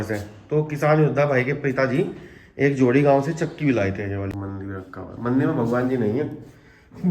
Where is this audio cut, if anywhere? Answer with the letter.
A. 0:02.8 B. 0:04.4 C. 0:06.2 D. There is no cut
B